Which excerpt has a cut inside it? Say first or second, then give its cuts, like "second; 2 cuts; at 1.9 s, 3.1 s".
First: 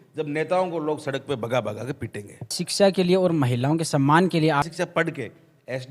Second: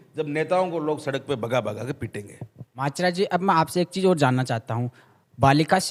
first; 2 cuts; at 2.6 s, 4.7 s